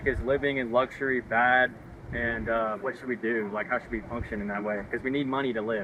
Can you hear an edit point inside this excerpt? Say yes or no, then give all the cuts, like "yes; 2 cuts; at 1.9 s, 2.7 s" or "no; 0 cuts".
no; 0 cuts